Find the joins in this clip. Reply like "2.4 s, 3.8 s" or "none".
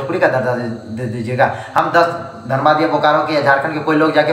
none